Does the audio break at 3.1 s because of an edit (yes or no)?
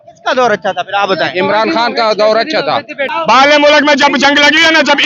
yes